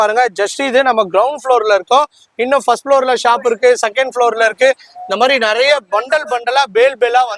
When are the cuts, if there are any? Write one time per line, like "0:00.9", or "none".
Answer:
none